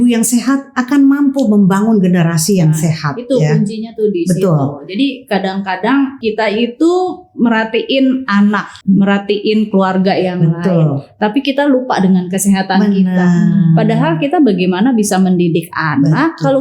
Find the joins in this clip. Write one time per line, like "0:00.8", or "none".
0:06.2
0:08.7